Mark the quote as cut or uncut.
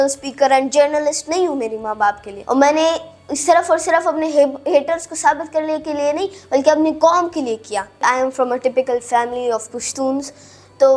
cut